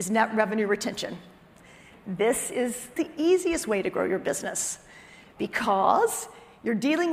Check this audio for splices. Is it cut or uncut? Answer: cut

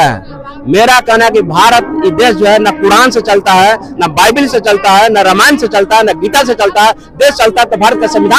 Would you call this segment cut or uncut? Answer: uncut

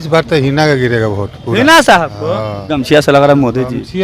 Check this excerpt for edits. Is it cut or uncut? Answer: cut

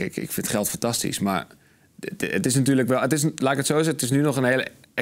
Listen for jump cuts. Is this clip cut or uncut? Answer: uncut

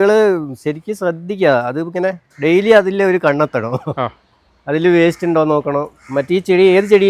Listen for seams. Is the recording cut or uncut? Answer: uncut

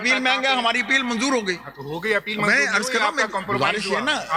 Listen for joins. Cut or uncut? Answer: uncut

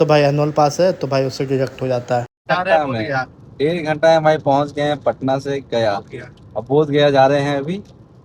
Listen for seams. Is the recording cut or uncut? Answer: cut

